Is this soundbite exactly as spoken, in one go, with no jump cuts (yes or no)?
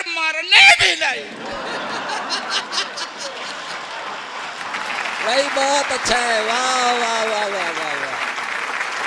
yes